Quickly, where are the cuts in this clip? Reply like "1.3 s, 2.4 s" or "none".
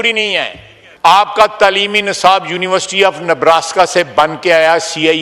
1.2 s